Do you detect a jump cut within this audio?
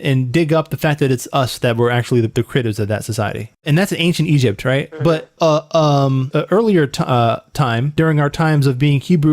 yes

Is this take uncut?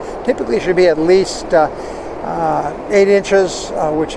yes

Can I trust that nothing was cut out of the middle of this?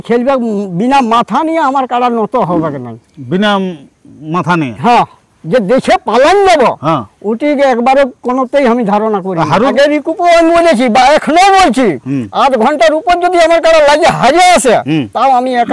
no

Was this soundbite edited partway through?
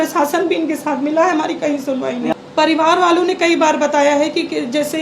yes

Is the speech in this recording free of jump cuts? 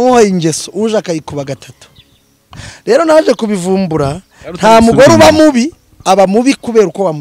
yes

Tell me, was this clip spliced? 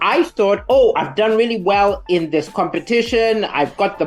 no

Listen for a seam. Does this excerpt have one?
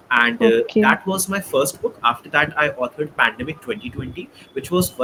no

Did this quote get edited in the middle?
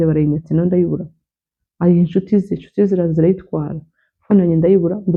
no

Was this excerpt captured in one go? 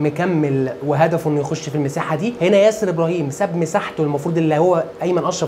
yes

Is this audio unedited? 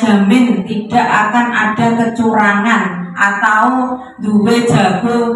yes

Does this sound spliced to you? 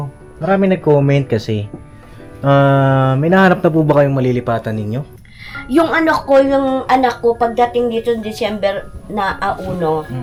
no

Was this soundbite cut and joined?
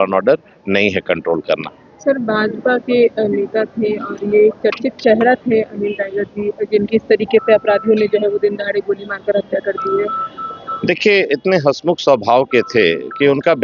no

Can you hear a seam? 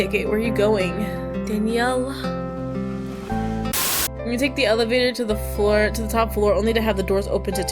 yes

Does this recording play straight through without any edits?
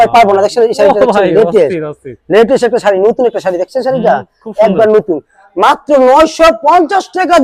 yes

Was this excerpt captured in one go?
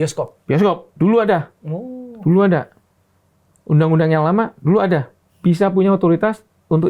yes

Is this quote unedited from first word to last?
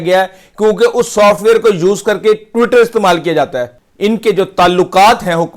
no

